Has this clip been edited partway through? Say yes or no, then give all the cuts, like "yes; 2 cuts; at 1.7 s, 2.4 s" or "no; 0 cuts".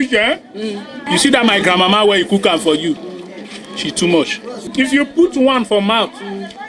yes; 2 cuts; at 1.0 s, 4.6 s